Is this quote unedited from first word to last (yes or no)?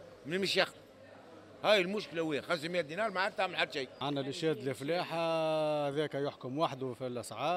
no